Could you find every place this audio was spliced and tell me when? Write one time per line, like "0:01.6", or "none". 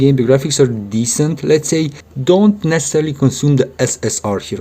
0:02.1